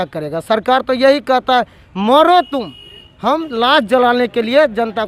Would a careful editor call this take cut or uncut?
uncut